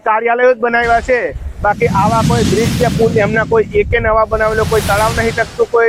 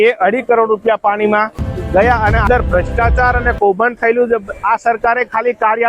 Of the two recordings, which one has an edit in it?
second; 2 cuts; at 2.4 s, 4.5 s

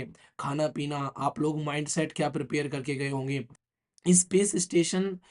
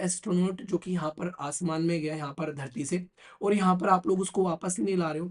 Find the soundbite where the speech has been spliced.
first; 1 cut; at 3.6 s

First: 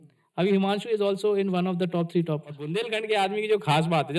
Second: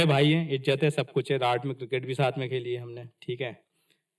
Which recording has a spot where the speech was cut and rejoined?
first; 1 cut; at 2.7 s

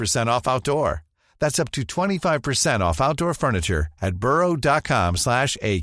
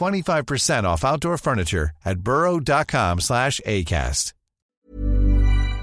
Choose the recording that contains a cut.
second; 1 cut; at 4.8 s

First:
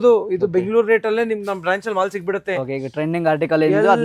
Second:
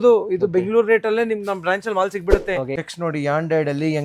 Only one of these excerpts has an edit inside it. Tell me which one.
second; 1 cut; at 2.7 s

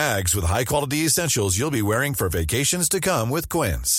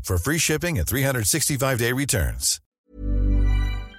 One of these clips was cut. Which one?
second; 1 cut; at 2.8 s

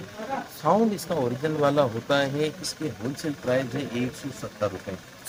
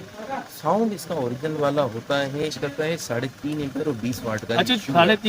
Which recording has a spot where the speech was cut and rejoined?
second; 1 cut; at 2.4 s

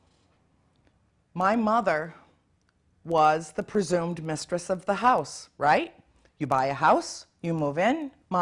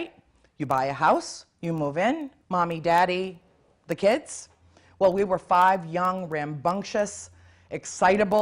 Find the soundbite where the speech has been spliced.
second; 1 cut; at 4.3 s

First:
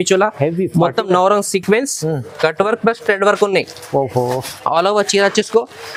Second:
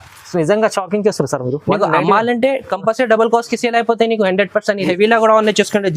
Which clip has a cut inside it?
second; 1 cut; at 4.9 s

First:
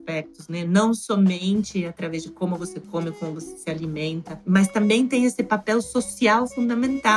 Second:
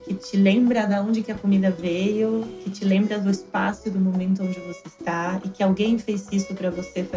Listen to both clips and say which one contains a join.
first; 1 cut; at 4.4 s

